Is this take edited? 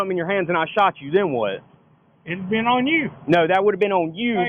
no; 0 cuts

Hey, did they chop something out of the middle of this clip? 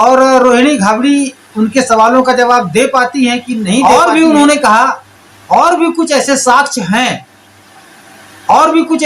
yes; 1 cut; at 3.8 s

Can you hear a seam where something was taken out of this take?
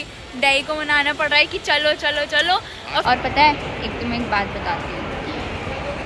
yes; 1 cut; at 3.0 s

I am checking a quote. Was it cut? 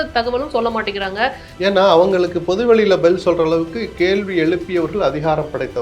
yes; 1 cut; at 1.5 s

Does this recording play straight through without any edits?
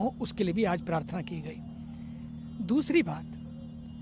yes; 0 cuts

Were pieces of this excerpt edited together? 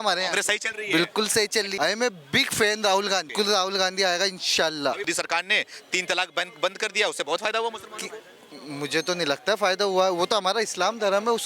yes; 3 cuts; at 1.7 s, 3.3 s, 5.1 s

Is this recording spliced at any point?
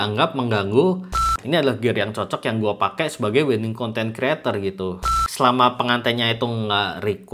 yes; 2 cuts; at 1.3 s, 5.1 s

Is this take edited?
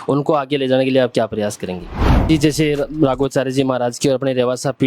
yes; 1 cut; at 2.2 s

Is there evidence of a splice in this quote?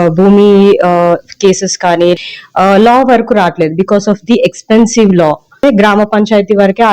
yes; 2 cuts; at 2.2 s, 5.6 s

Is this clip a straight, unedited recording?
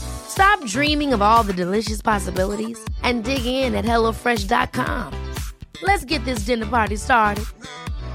yes; 0 cuts

